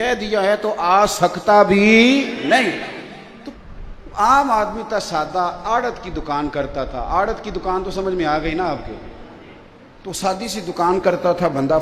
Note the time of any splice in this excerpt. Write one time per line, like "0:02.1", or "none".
0:03.6